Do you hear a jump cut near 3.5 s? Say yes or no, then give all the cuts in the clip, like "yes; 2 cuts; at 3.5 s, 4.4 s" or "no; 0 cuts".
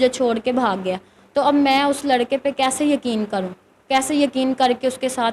no; 0 cuts